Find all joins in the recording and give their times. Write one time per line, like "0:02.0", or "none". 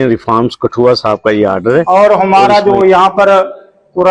0:01.9